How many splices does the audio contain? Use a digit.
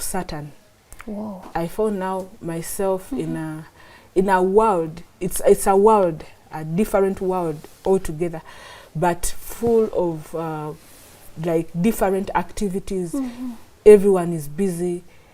0